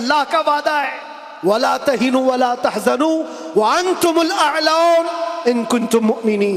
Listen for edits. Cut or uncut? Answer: uncut